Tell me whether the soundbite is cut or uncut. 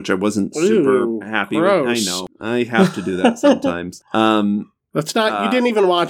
cut